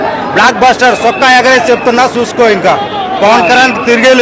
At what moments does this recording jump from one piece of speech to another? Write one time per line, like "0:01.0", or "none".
none